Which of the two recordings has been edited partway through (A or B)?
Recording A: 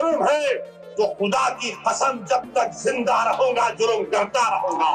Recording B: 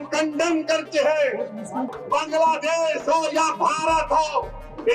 B